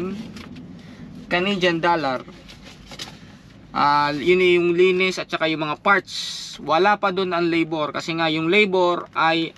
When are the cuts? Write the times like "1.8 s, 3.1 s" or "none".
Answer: none